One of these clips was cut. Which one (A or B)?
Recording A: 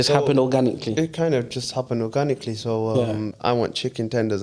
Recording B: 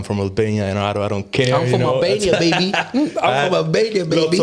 A